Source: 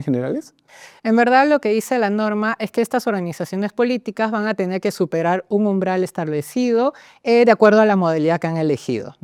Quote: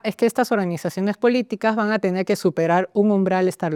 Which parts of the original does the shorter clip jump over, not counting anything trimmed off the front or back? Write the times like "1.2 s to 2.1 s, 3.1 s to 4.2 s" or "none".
none

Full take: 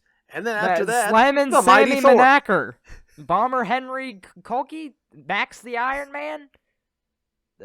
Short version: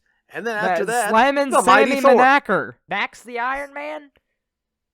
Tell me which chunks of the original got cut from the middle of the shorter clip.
2.8 s to 5.2 s

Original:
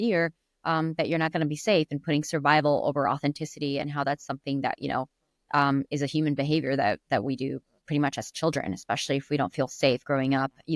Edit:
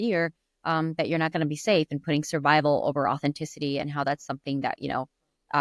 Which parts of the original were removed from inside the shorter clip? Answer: none

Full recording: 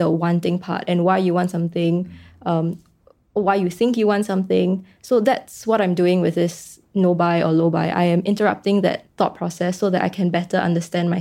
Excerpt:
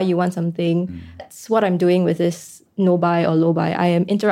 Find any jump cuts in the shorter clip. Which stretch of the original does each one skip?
2.4 s to 5.4 s

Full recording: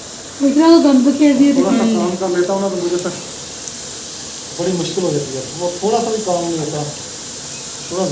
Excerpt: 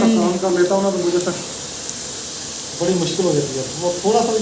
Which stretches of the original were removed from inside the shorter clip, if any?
none

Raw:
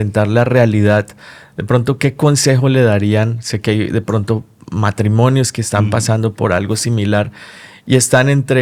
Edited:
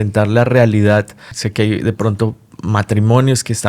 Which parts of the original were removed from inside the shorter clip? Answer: 1.4 s to 3.4 s

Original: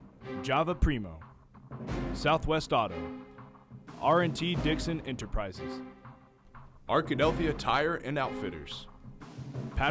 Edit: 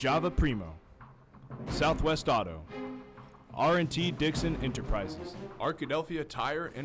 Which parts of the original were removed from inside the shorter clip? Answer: 5.6 s to 6.4 s

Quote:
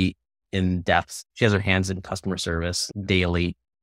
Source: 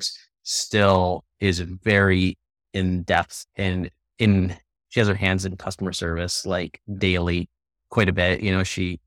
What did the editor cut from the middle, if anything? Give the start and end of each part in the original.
3.4 s to 4.8 s, 6.4 s to 6.8 s

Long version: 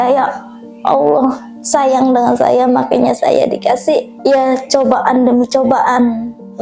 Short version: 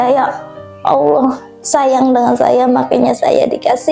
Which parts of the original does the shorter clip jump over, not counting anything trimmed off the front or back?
none

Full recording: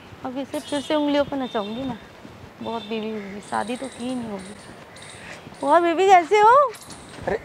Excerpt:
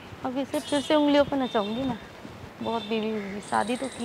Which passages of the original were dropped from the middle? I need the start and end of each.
none

